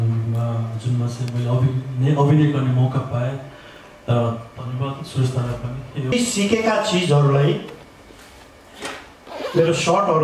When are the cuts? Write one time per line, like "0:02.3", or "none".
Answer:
0:06.1